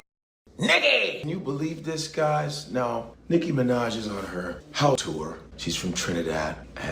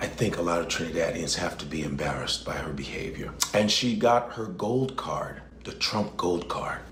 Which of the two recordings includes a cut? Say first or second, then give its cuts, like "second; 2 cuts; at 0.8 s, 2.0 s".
first; 1 cut; at 5.1 s